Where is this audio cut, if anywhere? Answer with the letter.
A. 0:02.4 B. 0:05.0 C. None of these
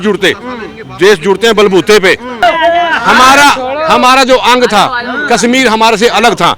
A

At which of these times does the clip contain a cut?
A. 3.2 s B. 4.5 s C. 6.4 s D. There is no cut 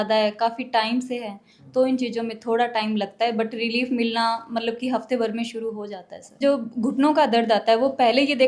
C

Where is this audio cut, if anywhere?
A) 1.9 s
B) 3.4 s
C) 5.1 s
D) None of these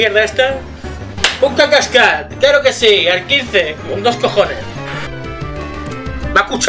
C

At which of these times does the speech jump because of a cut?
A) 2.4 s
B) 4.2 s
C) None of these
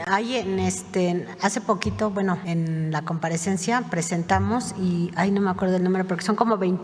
A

